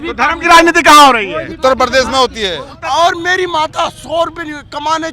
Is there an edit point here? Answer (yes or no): yes